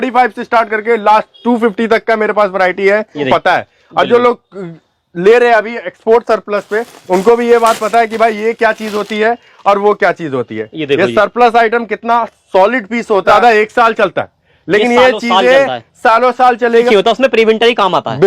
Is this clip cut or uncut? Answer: cut